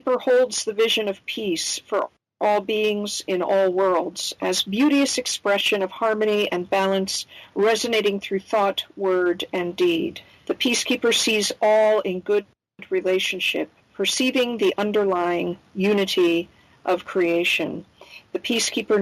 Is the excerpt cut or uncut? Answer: uncut